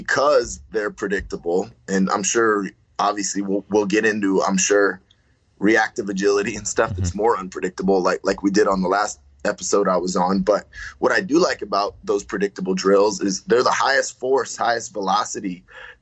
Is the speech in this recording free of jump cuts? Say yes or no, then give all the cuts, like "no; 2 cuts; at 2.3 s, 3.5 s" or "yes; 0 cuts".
yes; 0 cuts